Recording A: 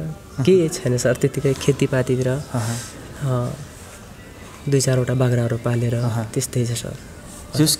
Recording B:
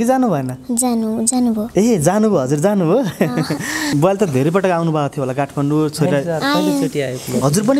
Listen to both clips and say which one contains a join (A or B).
B